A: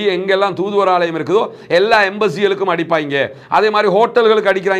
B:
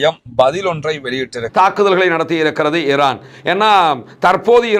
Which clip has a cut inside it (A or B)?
B